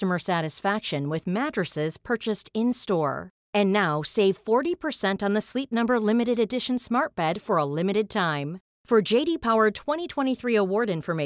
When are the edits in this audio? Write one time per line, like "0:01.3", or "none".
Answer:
none